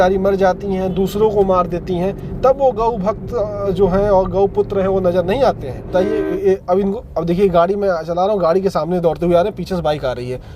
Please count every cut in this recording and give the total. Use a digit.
1